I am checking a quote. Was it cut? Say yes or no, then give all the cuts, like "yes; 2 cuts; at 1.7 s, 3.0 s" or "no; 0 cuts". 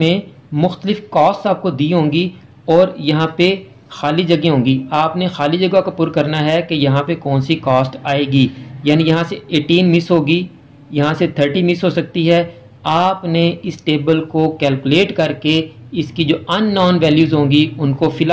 no; 0 cuts